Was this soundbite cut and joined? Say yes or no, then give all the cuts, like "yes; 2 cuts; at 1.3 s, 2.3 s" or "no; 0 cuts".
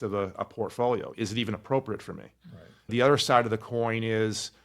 yes; 1 cut; at 2.9 s